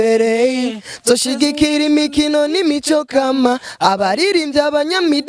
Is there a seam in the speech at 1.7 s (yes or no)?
no